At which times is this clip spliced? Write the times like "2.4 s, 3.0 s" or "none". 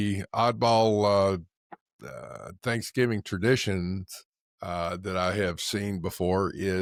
none